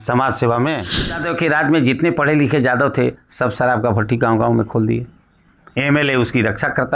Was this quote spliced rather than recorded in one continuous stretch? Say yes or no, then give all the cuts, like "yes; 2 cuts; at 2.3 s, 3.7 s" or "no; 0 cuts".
yes; 1 cut; at 1.3 s